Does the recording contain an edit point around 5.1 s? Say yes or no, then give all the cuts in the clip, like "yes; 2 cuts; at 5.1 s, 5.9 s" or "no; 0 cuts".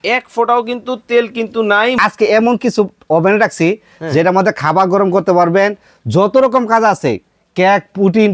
no; 1 cut; at 2.0 s